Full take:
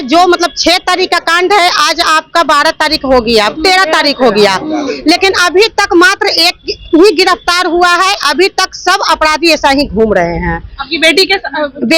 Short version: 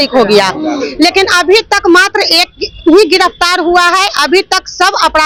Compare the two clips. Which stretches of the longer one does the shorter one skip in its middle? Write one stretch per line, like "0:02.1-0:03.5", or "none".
none